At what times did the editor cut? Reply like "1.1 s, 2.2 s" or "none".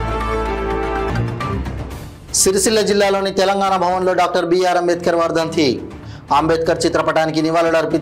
1.1 s